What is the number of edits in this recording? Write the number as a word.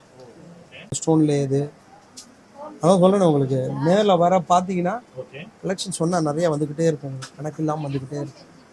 one